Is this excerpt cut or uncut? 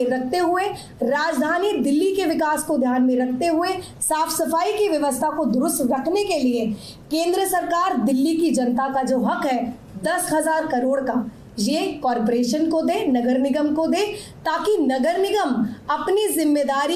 uncut